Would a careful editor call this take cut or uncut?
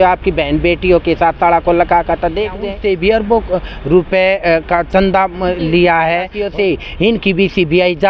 cut